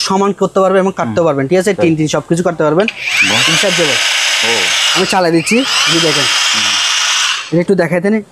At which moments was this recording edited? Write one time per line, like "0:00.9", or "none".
none